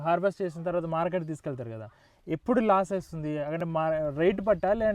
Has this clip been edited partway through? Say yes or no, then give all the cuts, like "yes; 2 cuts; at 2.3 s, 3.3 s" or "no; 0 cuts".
no; 0 cuts